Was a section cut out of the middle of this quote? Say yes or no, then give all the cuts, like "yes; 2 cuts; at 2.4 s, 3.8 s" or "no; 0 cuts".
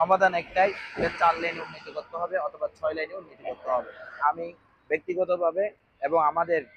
no; 0 cuts